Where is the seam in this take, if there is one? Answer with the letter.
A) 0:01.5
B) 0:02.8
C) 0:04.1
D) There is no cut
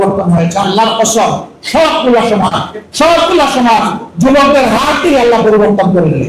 D